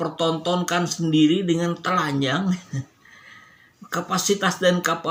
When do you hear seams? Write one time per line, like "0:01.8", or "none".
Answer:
none